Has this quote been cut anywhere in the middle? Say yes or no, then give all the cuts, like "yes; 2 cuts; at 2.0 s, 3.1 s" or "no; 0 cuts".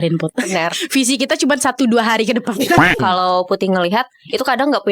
yes; 1 cut; at 2.9 s